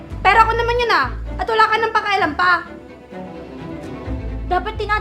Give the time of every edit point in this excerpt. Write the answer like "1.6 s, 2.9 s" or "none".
none